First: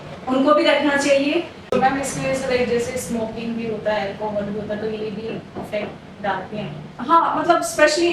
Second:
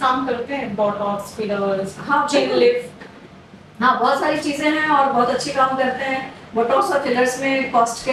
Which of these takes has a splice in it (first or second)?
first